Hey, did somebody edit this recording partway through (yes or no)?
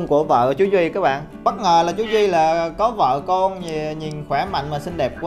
yes